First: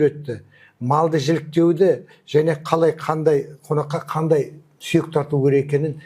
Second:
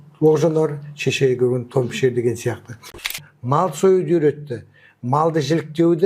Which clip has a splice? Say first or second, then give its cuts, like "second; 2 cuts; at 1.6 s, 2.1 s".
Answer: second; 1 cut; at 3.0 s